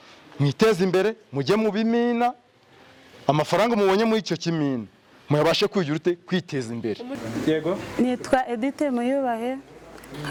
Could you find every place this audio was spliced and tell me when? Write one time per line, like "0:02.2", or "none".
none